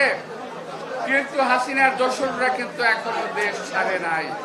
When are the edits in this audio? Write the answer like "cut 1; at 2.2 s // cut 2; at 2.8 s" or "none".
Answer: none